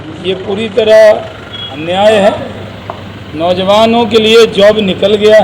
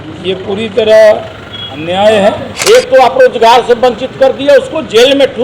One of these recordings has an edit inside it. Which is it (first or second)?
second